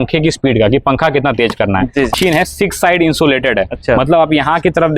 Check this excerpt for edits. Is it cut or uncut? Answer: cut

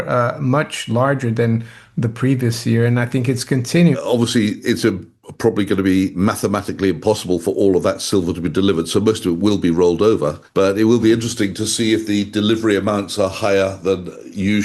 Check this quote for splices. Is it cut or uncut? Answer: cut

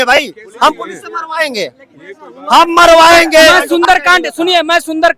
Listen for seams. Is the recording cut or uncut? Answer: cut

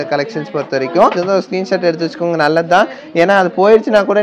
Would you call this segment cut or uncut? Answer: cut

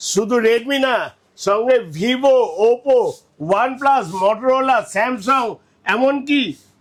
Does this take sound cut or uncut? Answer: uncut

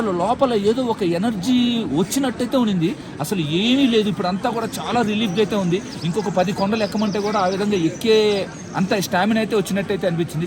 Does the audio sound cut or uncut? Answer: uncut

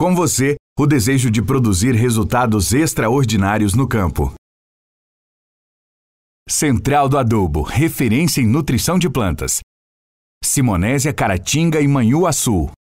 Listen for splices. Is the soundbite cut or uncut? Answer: uncut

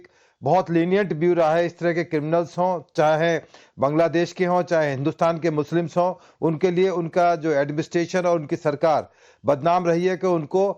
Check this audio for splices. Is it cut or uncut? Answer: uncut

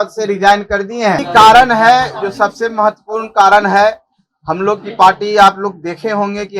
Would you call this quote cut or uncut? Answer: cut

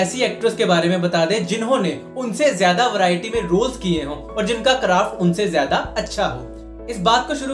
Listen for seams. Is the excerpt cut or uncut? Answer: uncut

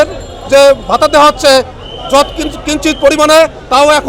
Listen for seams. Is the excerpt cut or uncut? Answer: uncut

